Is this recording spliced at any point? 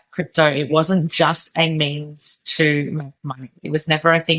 no; 0 cuts

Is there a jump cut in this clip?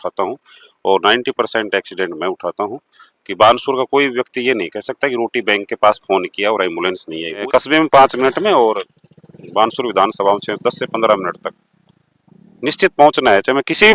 yes; 1 cut; at 7.4 s

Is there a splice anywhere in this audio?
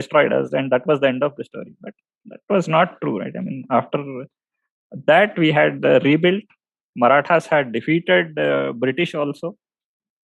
no; 0 cuts

